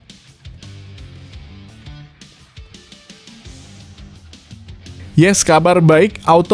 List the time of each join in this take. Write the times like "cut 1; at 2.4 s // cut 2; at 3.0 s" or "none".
cut 1; at 5.1 s